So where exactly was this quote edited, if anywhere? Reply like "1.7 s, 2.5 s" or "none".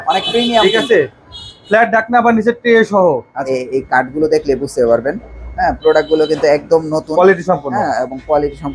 3.5 s